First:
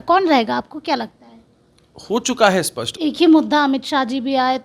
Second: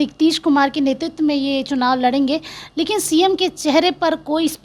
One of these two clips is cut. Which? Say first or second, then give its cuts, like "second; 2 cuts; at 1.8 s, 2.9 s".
first; 1 cut; at 2.8 s